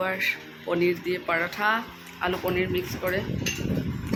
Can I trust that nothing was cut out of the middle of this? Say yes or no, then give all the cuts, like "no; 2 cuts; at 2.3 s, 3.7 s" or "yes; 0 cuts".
yes; 0 cuts